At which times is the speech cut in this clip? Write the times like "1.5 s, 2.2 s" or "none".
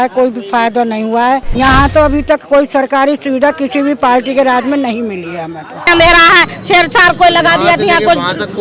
1.5 s, 5.9 s